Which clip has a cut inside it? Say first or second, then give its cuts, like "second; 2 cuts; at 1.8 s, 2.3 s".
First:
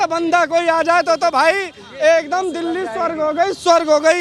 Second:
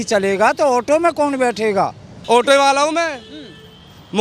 second; 1 cut; at 2.1 s